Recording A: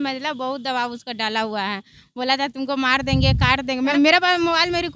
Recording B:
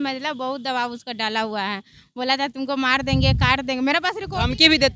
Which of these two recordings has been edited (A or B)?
A